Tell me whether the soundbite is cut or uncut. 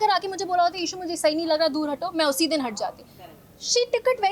uncut